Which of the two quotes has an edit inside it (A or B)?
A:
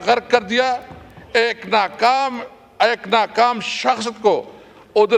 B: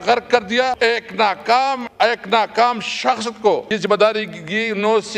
B